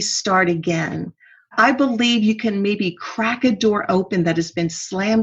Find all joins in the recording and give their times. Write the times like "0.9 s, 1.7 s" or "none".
1.5 s

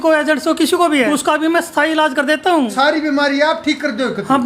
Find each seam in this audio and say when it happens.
1.1 s, 2.7 s

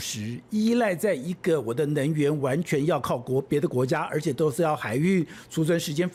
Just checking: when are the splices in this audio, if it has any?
none

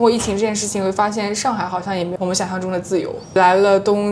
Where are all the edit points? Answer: 2.1 s, 3.3 s

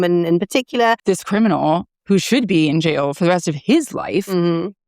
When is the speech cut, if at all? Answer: 1.0 s

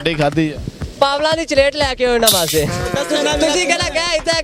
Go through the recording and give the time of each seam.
2.9 s

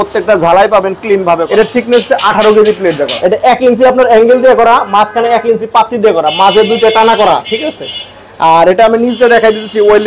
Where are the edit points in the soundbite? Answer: 1.4 s, 3.1 s

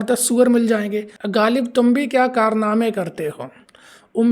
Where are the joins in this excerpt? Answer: 1.2 s

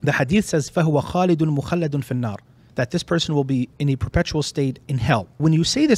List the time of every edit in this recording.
2.6 s, 3.8 s, 5.3 s

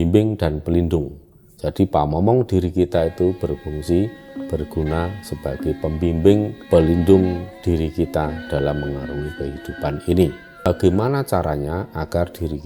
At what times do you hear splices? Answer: 10.6 s

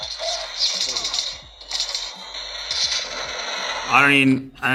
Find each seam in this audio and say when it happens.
none

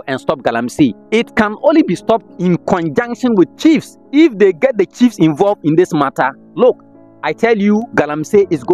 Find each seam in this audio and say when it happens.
1.0 s, 4.0 s

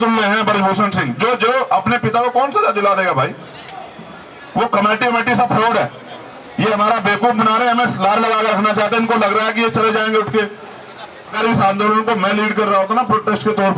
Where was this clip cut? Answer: 11.3 s

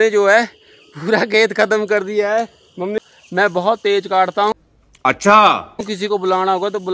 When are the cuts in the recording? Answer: 2.9 s

